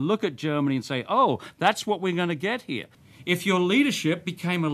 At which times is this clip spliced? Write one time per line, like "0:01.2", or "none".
0:03.0